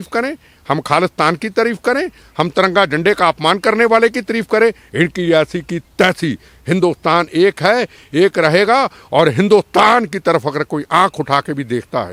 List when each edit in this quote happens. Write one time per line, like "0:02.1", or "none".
none